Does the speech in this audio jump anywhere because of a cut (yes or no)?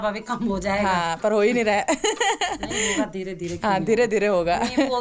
no